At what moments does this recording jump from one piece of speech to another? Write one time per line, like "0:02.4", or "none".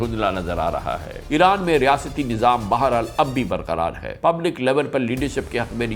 0:01.1
0:04.1

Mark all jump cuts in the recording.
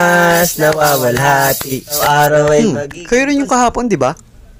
0:02.0

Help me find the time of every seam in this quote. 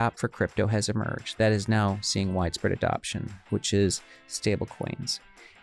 none

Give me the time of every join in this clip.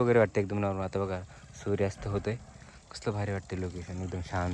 none

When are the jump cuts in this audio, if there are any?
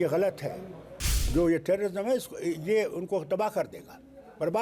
0:01.2

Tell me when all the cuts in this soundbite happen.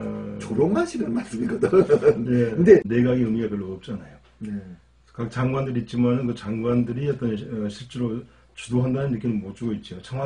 0:02.9

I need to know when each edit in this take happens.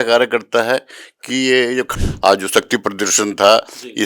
0:01.9

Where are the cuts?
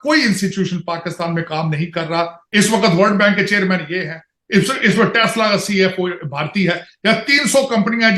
0:02.4

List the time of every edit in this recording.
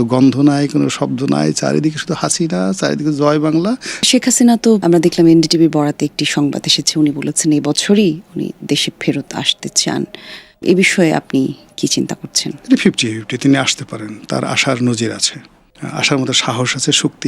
0:03.9

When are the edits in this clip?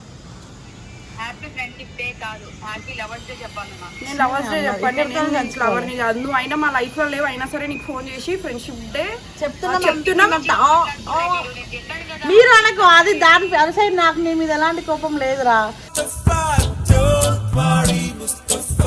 none

